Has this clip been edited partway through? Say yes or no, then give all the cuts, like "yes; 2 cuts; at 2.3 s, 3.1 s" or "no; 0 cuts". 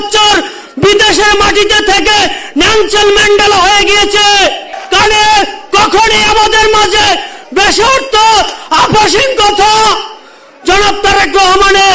yes; 1 cut; at 4.7 s